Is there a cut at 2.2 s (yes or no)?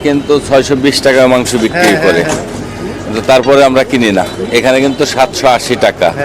no